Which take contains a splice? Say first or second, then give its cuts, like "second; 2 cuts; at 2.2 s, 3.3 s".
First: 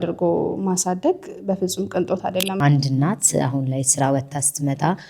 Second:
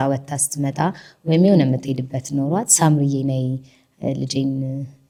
first; 1 cut; at 2.6 s